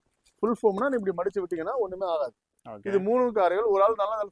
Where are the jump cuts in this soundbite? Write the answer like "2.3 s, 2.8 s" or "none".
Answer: 2.7 s